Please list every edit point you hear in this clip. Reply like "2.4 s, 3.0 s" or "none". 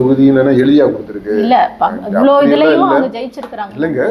none